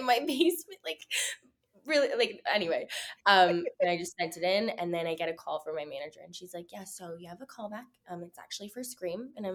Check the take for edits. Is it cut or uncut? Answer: uncut